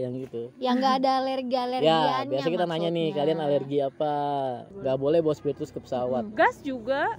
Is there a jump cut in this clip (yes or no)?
yes